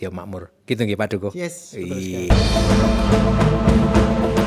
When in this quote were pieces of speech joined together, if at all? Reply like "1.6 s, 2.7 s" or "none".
2.3 s